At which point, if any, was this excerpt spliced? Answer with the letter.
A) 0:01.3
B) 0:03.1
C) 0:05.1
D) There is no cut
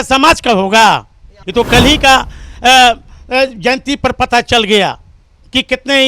A